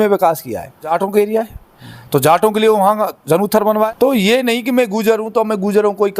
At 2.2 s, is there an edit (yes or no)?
no